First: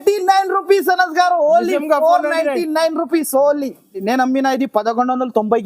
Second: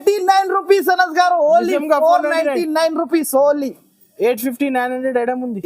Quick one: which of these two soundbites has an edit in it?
first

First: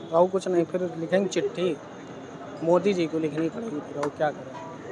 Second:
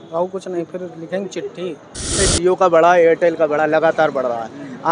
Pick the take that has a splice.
second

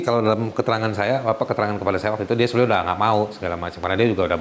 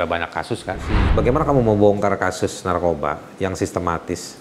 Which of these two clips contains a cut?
second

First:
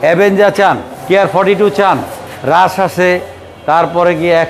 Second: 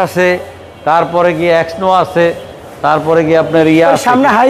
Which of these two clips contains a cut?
first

